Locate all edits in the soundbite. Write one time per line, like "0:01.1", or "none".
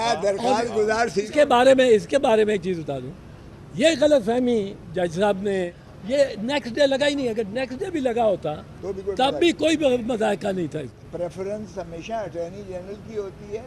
0:01.3
0:05.8
0:10.9